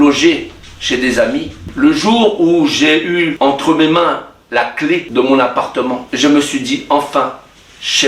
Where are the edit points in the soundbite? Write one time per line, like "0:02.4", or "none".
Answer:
0:01.6
0:03.3
0:05.1
0:06.1